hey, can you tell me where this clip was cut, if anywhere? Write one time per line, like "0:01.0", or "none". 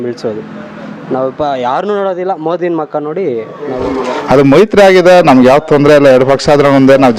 0:03.9